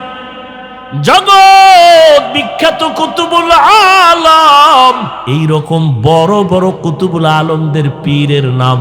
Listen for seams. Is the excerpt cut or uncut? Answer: cut